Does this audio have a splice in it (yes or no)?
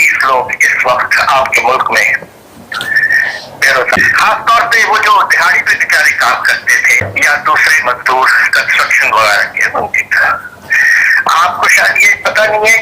yes